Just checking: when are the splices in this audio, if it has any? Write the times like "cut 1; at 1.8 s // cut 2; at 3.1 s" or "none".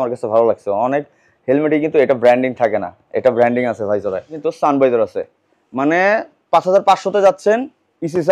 cut 1; at 4.4 s